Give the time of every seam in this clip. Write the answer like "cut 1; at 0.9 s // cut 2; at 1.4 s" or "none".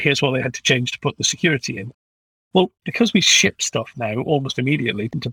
cut 1; at 2.2 s